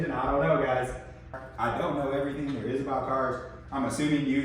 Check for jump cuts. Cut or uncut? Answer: cut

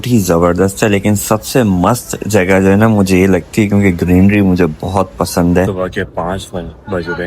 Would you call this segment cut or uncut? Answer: cut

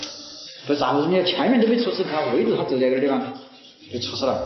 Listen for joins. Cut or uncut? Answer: uncut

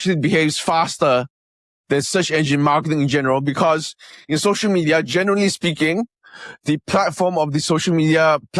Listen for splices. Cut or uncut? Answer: uncut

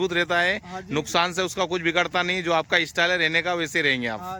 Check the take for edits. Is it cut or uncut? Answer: uncut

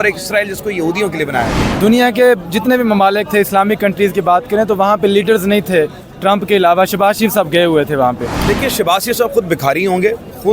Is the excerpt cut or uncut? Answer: cut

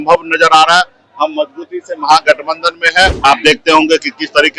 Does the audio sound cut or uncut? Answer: cut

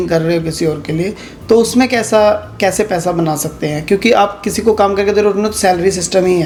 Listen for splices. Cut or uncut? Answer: uncut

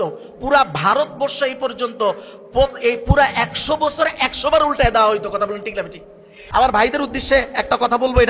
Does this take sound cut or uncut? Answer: cut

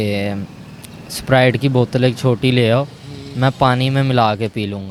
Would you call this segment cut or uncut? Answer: uncut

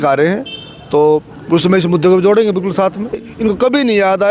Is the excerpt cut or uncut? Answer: cut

